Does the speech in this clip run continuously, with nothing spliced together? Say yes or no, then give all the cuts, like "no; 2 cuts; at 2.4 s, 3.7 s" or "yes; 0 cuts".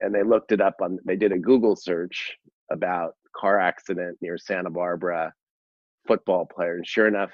yes; 0 cuts